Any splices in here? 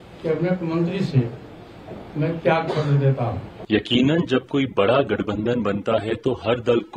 yes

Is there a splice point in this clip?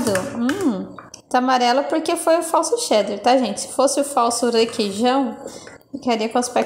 no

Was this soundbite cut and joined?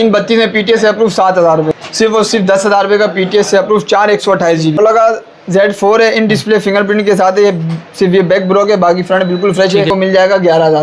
yes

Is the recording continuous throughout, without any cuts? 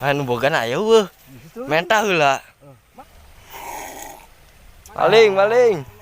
no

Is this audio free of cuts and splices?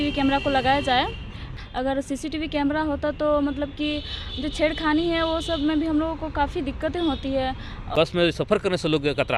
no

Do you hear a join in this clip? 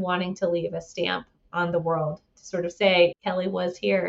yes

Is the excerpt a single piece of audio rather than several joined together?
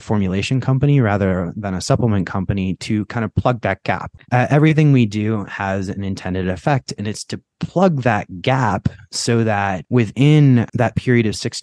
no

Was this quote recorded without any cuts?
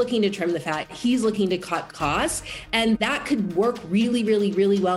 yes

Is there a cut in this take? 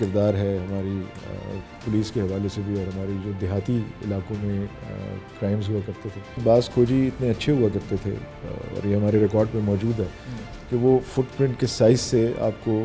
yes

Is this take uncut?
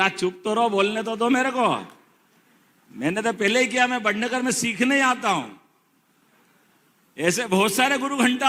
yes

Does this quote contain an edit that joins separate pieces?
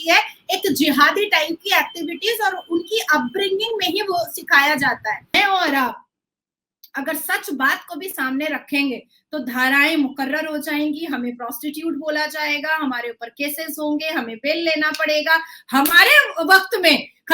yes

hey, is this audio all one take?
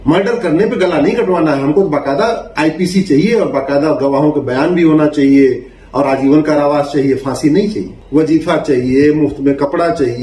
no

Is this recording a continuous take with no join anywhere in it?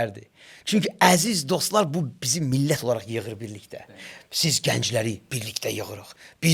yes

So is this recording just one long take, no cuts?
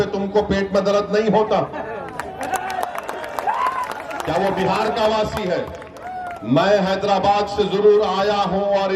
yes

